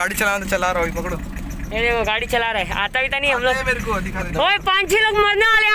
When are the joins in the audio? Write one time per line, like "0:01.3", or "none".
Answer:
none